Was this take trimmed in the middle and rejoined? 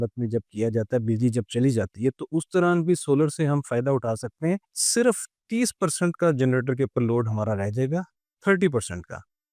yes; 1 cut; at 4.8 s

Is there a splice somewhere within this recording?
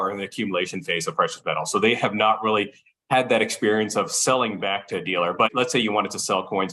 yes; 1 cut; at 5.5 s

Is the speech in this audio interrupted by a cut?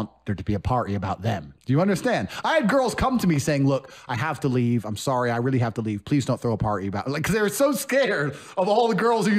no; 0 cuts

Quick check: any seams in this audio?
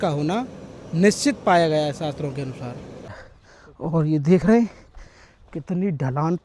yes; 1 cut; at 3.1 s

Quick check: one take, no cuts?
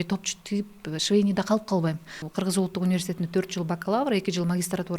no; 1 cut; at 2.2 s

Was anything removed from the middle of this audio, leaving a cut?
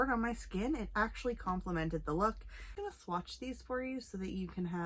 yes; 1 cut; at 2.7 s

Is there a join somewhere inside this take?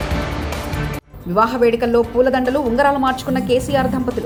no; 0 cuts

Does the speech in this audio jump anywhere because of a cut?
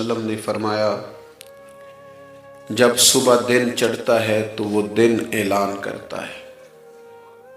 yes; 1 cut; at 6.3 s

